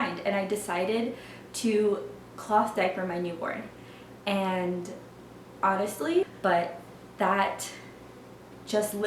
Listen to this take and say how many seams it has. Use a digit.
1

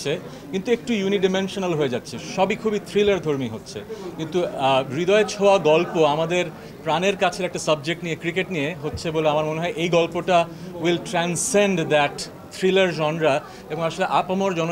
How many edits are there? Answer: 0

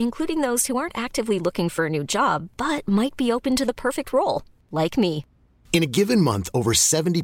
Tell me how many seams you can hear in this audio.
0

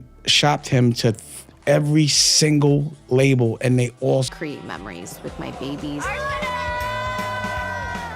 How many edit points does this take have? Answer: 1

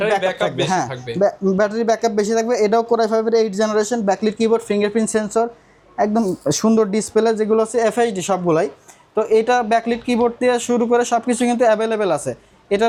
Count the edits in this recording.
0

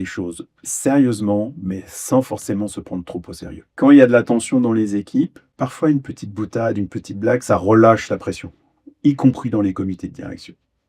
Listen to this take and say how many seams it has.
2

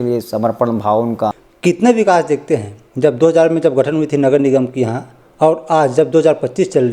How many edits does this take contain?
1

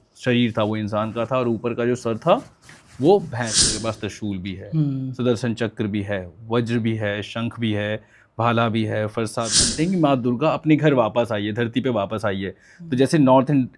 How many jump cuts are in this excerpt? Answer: 2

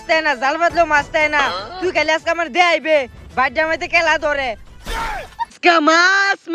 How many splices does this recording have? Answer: 1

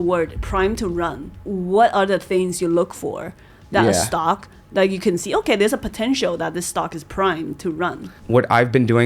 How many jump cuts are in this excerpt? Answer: 2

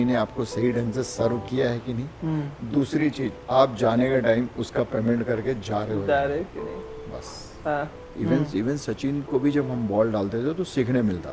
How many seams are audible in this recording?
1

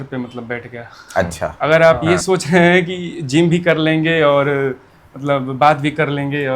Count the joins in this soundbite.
1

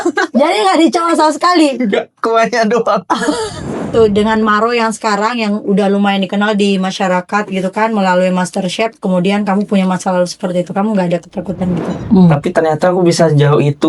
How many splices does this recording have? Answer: 2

